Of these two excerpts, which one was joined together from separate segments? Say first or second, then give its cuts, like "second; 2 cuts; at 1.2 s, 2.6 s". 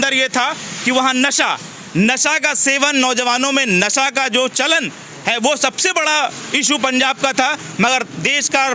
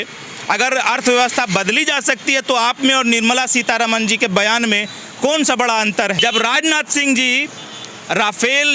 second; 1 cut; at 6.2 s